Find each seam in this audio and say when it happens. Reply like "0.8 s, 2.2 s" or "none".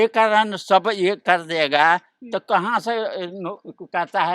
none